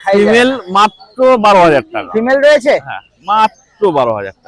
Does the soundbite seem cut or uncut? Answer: uncut